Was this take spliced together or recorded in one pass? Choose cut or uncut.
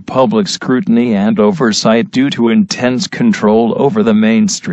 uncut